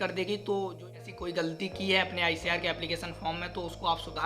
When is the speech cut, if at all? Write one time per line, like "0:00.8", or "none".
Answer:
0:01.0